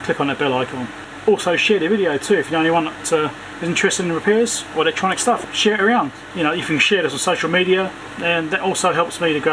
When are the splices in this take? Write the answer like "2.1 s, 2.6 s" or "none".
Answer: 1.1 s, 5.4 s, 8.0 s